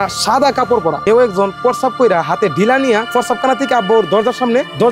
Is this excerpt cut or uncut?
cut